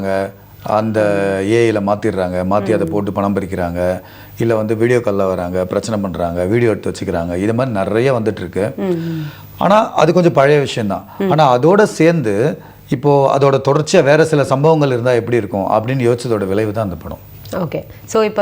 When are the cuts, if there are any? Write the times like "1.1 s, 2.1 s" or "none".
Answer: none